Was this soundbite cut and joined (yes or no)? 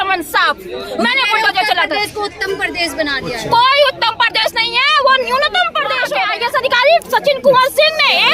yes